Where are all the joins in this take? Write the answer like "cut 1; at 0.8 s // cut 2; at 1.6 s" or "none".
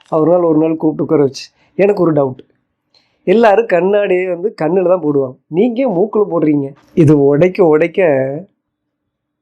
cut 1; at 6.8 s